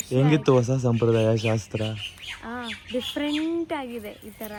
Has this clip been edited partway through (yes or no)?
no